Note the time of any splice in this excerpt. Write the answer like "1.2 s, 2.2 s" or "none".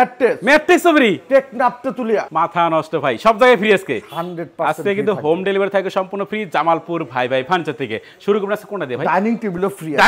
none